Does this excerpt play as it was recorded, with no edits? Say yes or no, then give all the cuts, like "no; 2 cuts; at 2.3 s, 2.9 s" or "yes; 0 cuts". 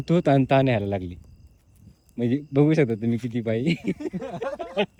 yes; 0 cuts